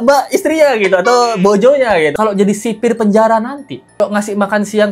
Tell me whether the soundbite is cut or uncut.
cut